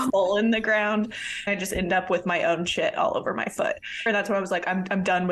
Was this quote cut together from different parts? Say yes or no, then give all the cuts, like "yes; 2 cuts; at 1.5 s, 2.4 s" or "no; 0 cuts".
yes; 2 cuts; at 1.5 s, 4.1 s